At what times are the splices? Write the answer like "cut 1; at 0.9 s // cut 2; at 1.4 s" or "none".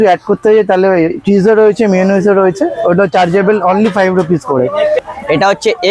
cut 1; at 5.0 s